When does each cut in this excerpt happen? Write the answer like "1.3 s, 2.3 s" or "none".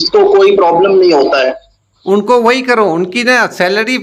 1.9 s